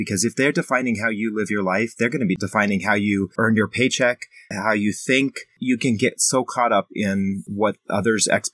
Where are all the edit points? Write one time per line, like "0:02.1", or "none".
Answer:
0:02.4
0:03.3
0:04.5
0:05.6
0:07.5